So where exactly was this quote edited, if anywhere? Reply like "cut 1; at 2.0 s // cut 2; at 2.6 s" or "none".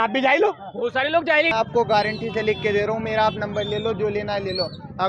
cut 1; at 1.5 s